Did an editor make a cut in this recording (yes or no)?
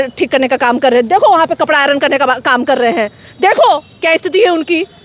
no